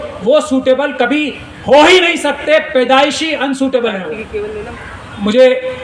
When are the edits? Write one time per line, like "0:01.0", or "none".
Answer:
0:04.7